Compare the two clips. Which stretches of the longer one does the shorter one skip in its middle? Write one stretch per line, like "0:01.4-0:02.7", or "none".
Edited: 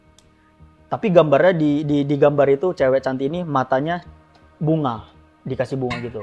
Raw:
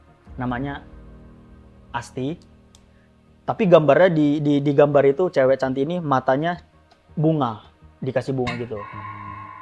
none